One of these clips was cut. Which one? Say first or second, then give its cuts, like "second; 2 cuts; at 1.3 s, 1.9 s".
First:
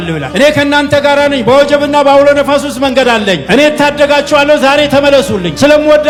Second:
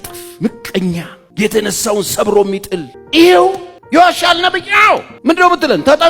second; 4 cuts; at 1.2 s, 3.0 s, 3.7 s, 5.1 s